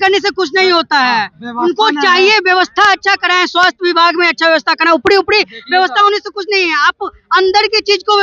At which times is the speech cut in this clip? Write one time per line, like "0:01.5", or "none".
none